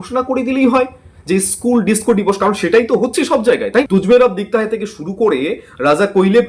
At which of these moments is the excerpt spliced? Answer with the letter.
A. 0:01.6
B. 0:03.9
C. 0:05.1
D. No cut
B